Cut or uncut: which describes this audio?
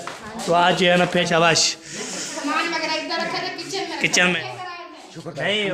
cut